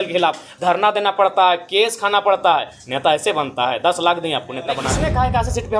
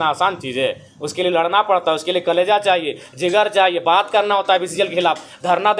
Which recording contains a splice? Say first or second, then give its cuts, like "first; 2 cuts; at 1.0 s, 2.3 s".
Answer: first; 1 cut; at 4.9 s